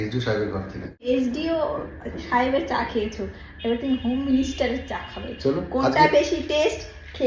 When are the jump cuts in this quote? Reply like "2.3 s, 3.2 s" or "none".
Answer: 1.0 s